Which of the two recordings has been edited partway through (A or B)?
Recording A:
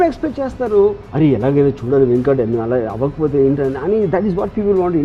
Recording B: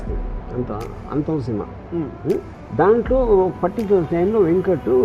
B